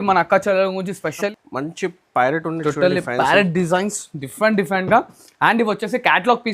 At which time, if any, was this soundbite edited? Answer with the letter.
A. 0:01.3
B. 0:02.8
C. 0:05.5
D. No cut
A